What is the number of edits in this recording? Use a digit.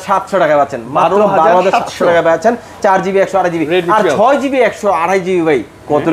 0